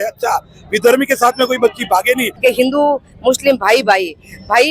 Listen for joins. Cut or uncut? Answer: cut